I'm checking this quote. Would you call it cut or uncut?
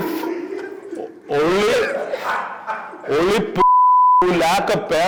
uncut